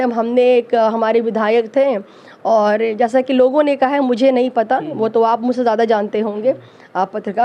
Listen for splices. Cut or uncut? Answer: uncut